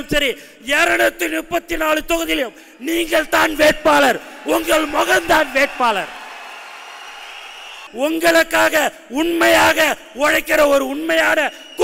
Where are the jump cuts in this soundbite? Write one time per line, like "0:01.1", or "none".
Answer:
0:07.8